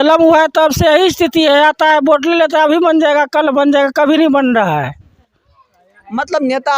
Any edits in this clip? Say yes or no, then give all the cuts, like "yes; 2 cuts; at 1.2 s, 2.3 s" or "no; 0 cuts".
no; 0 cuts